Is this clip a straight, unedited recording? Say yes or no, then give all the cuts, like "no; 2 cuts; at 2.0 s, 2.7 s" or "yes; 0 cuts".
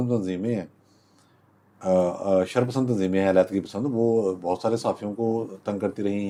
yes; 0 cuts